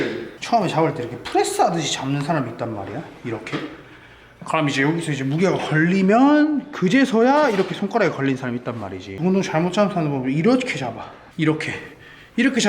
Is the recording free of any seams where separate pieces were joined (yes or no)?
no